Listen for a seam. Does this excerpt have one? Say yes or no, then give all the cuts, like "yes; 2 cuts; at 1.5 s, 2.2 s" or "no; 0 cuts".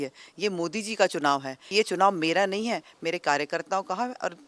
yes; 1 cut; at 1.6 s